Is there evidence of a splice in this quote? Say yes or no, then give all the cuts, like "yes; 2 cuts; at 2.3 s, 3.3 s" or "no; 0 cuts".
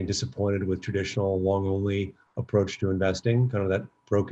no; 0 cuts